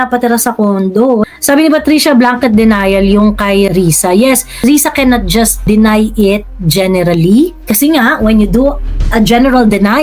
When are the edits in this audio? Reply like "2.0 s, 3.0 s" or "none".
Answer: 1.2 s, 3.7 s, 4.6 s, 5.6 s, 7.6 s